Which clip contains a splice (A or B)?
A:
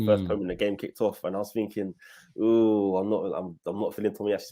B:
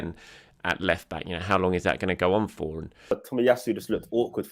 B